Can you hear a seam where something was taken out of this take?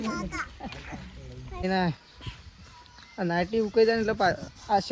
yes; 1 cut; at 1.6 s

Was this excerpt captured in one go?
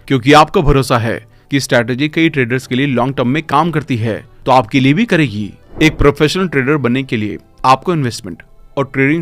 no; 1 cut; at 5.6 s

